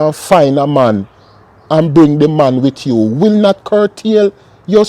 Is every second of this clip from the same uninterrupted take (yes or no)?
yes